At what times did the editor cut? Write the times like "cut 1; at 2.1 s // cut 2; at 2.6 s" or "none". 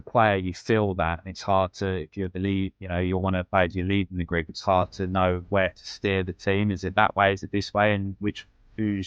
none